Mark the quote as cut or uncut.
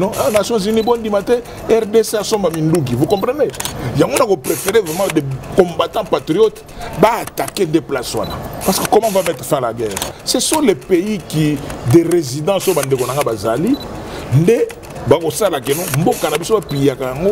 cut